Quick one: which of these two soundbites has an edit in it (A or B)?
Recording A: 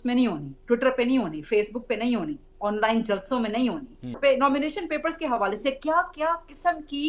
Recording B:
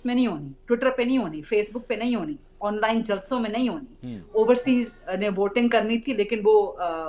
A